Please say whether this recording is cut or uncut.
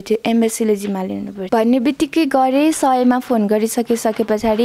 cut